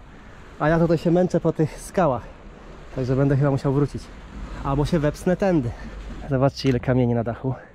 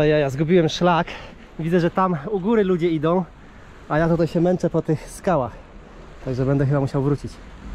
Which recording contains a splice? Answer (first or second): first